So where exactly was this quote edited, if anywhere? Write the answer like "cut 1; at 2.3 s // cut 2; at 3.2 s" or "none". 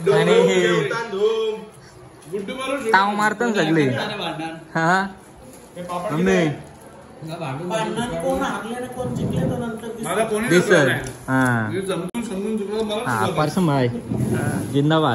none

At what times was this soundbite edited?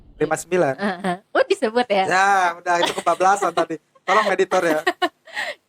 none

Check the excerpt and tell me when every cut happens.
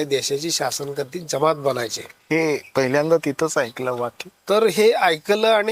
none

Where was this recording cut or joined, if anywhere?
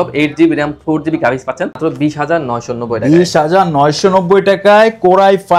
cut 1; at 1.8 s

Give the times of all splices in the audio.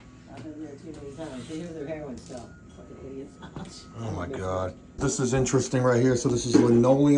cut 1; at 5.0 s

